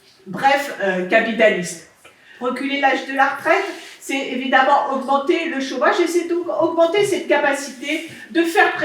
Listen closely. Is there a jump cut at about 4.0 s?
no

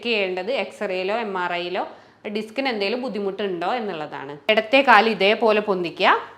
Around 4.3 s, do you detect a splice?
yes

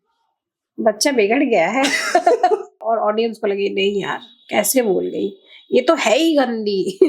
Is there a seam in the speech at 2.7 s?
yes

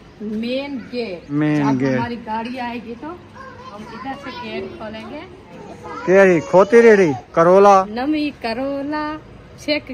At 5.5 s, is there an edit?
yes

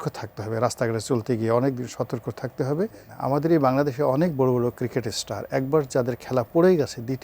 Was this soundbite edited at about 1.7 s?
no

